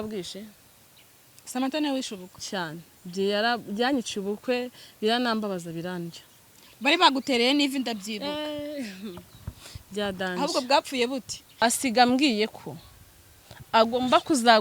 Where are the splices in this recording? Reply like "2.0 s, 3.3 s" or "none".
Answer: 11.6 s